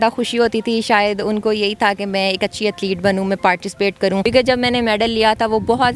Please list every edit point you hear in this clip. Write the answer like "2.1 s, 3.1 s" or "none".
4.2 s

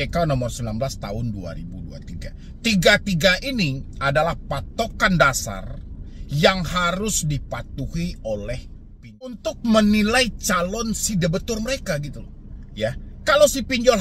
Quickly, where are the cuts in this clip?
9.4 s

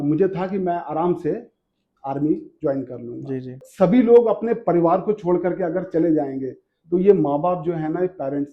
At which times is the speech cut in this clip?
3.6 s

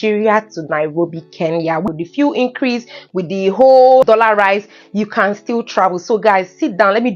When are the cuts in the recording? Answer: 1.9 s, 4.0 s

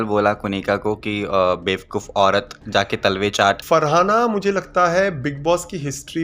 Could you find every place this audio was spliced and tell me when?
3.6 s

